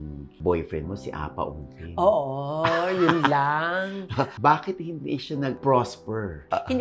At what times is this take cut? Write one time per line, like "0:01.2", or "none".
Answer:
0:04.3